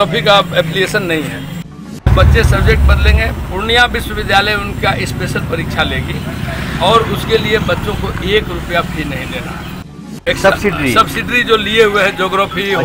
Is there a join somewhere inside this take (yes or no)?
yes